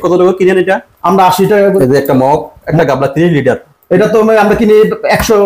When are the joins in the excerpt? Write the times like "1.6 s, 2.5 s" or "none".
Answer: 1.8 s, 2.6 s